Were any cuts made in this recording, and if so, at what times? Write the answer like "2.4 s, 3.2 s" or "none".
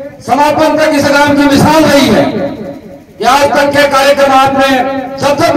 none